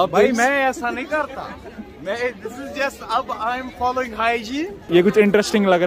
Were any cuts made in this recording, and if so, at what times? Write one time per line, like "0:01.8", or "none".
0:04.9